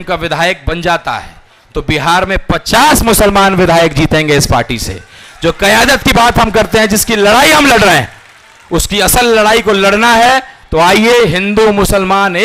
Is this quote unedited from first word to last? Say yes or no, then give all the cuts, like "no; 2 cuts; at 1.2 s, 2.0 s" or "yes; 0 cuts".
yes; 0 cuts